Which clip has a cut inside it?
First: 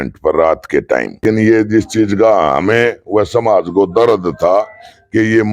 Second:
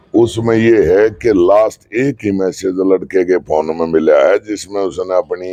first; 1 cut; at 1.2 s

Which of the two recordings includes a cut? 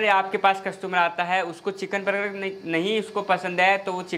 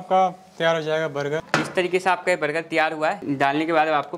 second; 2 cuts; at 1.4 s, 3.2 s

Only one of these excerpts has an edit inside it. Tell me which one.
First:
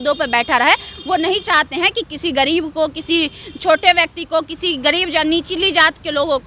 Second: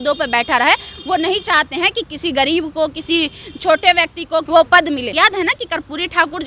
second; 2 cuts; at 4.5 s, 5.1 s

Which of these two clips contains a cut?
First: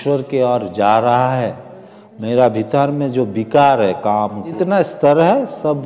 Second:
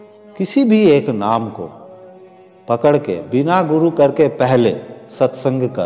first; 1 cut; at 4.5 s

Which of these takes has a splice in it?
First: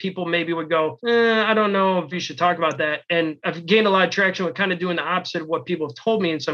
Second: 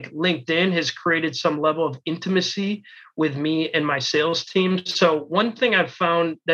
first; 3 cuts; at 1.0 s, 2.1 s, 3.4 s

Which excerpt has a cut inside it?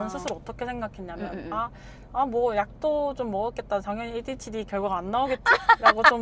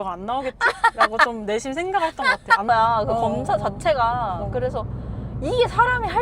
second; 1 cut; at 2.7 s

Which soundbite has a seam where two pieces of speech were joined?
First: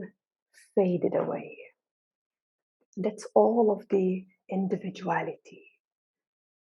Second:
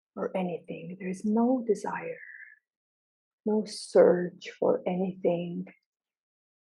second; 1 cut; at 3.3 s

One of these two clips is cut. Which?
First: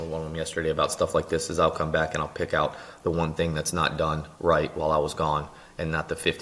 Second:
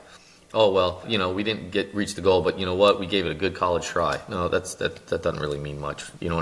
second; 1 cut; at 1.0 s

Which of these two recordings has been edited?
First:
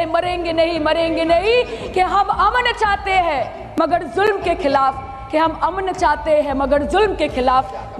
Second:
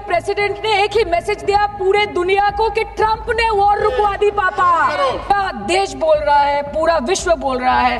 second; 1 cut; at 5.3 s

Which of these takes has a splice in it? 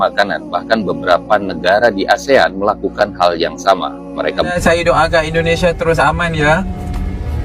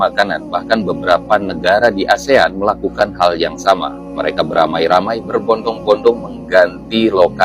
first; 1 cut; at 4.5 s

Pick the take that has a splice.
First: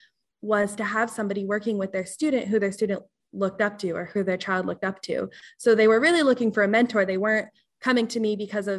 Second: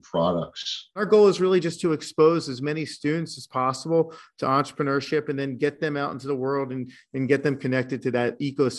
second; 1 cut; at 1.0 s

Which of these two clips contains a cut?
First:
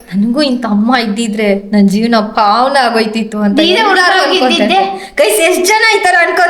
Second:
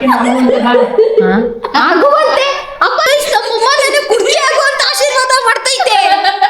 second; 1 cut; at 3.1 s

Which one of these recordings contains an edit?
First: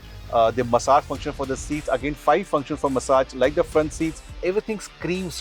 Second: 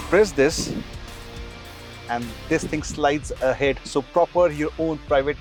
first; 1 cut; at 4.4 s

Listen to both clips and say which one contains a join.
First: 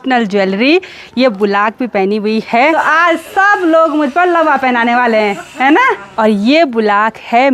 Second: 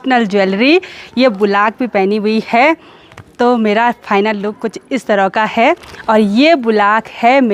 first; 2 cuts; at 2.8 s, 6.1 s

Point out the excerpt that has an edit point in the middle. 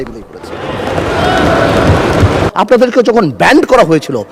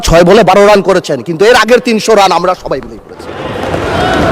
first; 1 cut; at 2.5 s

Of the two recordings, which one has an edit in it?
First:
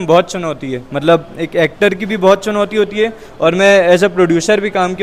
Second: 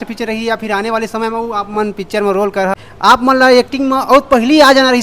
second; 1 cut; at 2.8 s

